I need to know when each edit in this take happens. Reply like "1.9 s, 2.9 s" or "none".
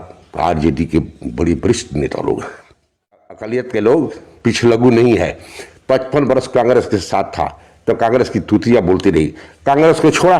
3.3 s